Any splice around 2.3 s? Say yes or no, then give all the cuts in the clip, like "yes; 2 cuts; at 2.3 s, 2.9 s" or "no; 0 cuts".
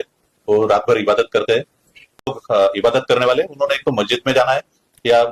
yes; 1 cut; at 2.3 s